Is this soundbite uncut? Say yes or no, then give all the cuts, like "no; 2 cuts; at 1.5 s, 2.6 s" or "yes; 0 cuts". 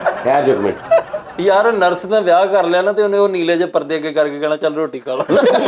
no; 1 cut; at 1.2 s